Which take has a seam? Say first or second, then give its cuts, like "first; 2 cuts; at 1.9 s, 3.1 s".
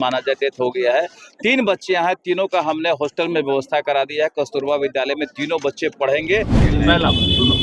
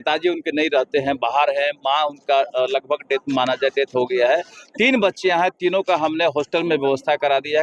first; 1 cut; at 6.7 s